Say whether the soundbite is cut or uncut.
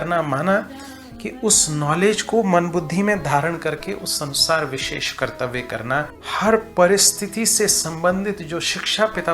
cut